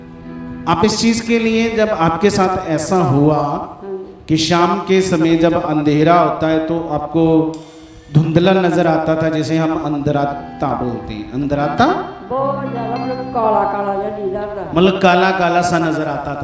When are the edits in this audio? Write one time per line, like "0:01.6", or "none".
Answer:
none